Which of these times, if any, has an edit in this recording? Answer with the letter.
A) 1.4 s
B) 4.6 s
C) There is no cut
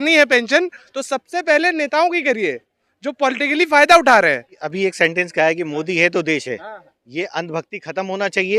B